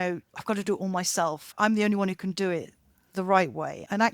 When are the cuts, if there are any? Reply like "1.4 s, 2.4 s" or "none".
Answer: 1.5 s